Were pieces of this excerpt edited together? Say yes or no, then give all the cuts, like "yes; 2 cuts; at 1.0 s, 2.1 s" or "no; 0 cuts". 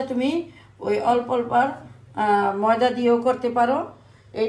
no; 0 cuts